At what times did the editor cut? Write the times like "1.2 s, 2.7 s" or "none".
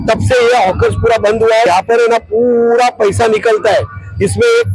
1.7 s